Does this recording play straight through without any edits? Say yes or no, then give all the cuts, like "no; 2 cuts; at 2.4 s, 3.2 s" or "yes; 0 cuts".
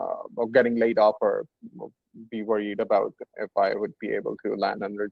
yes; 0 cuts